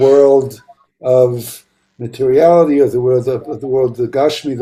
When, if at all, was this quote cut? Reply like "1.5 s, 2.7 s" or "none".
none